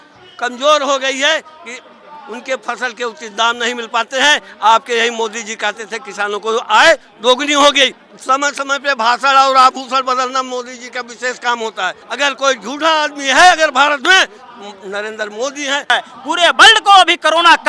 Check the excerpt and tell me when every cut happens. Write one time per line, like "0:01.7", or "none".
0:08.1
0:12.0
0:15.9